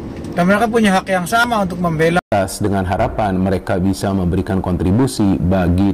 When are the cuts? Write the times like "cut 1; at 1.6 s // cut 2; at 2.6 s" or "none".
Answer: cut 1; at 2.3 s